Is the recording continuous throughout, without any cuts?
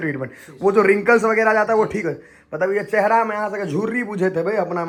yes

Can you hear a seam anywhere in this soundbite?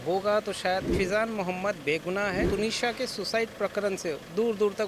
yes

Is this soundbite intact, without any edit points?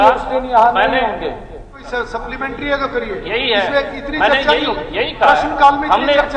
no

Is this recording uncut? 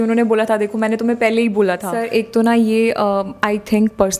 no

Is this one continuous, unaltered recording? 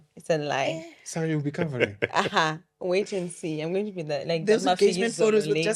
yes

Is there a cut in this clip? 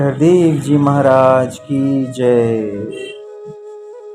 yes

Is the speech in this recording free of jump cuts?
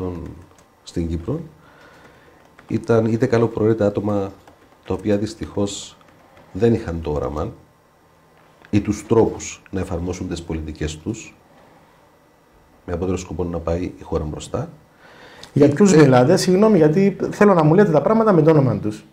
yes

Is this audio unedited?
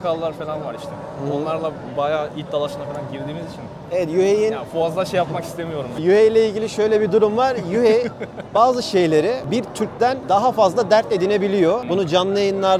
yes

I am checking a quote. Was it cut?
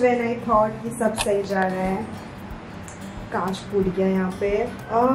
no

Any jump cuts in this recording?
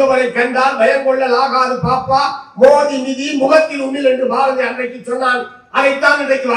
no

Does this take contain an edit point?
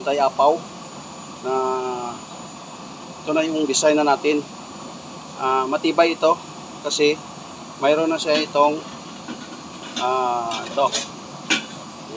no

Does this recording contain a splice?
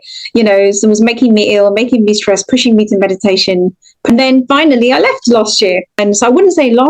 yes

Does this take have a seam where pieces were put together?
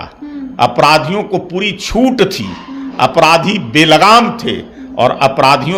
no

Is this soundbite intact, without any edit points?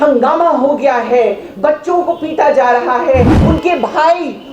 no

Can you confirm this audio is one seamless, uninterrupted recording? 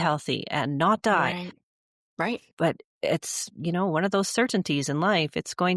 yes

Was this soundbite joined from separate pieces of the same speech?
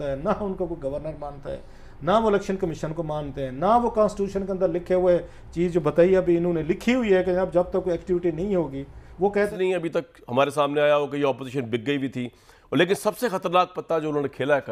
yes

